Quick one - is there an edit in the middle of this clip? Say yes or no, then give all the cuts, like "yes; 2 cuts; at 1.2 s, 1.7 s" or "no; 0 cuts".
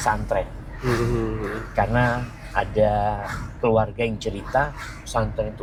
no; 0 cuts